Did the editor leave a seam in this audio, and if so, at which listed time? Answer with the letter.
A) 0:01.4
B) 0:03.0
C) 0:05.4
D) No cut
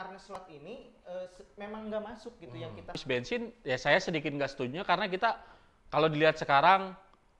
B